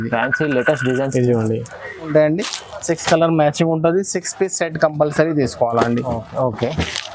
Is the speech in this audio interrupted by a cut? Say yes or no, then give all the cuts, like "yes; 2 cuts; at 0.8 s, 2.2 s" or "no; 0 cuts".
yes; 1 cut; at 2.1 s